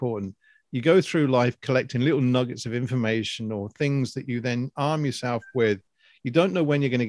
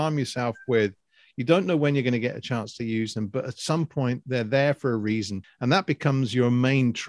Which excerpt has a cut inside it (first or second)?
second